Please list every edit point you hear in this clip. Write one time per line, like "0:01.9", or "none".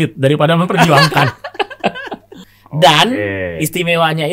0:02.4